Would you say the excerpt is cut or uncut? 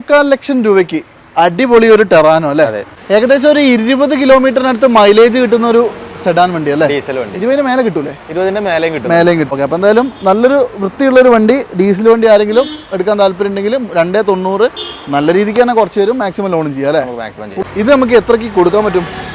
cut